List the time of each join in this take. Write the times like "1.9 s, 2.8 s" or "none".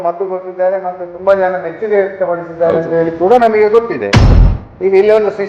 4.2 s